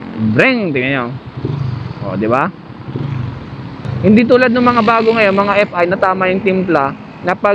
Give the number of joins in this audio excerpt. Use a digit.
1